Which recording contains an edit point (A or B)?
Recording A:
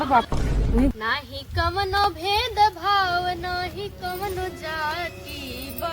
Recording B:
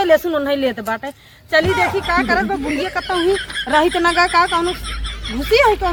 A